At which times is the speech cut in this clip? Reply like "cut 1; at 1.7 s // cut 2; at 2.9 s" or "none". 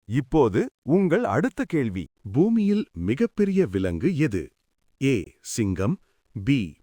cut 1; at 2.0 s